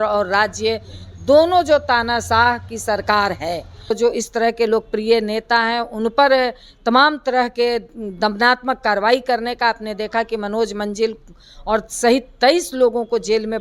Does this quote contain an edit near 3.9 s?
yes; 1 cut; at 3.9 s

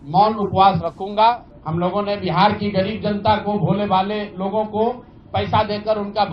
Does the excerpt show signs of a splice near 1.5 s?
yes; 1 cut; at 1.5 s

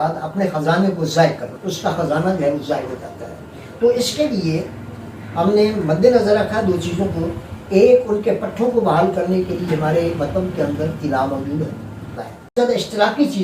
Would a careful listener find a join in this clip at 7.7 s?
no; 2 cuts; at 1.5 s, 12.5 s

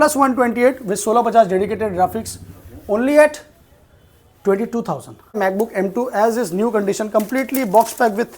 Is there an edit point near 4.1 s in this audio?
no; 1 cut; at 5.4 s

